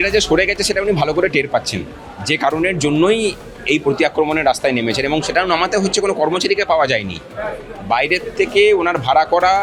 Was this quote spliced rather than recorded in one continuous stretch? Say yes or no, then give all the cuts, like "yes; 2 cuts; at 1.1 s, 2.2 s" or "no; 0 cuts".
no; 0 cuts